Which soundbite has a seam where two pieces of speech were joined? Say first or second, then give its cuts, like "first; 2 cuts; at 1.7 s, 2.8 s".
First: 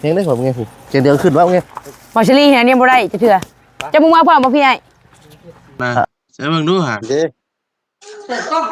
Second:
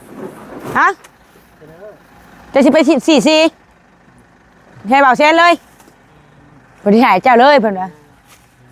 first; 1 cut; at 6.0 s